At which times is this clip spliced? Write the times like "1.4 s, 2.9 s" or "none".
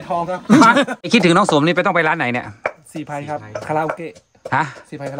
1.0 s